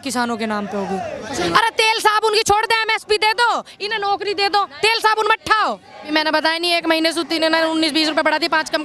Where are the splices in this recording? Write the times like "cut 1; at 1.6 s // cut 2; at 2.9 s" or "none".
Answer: cut 1; at 1.4 s // cut 2; at 6.1 s